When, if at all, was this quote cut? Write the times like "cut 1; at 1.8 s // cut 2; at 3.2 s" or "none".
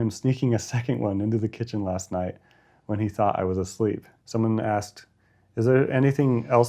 cut 1; at 4.1 s

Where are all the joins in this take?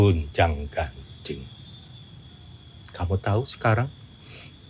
none

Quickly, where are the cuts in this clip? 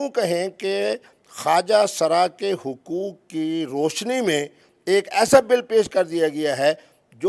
none

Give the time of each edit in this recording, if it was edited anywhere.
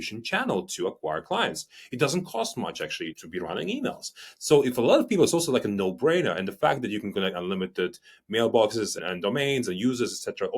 cut 1; at 3.2 s // cut 2; at 9.0 s

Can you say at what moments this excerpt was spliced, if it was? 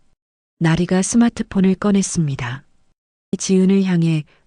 cut 1; at 3.4 s

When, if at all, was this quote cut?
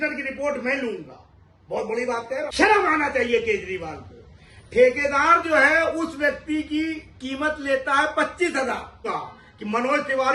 cut 1; at 2.5 s // cut 2; at 9.0 s

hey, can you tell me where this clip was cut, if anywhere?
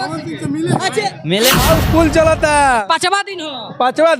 cut 1; at 1.6 s

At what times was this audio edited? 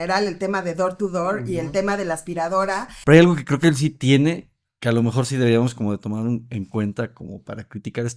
cut 1; at 2.8 s

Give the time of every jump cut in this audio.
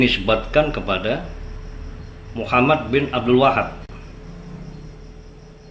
none

